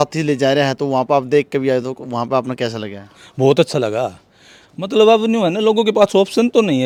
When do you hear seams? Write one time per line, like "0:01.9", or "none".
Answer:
none

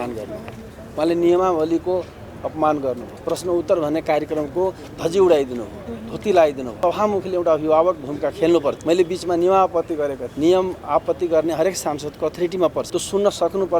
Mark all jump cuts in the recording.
0:06.8
0:08.8
0:10.2
0:12.9

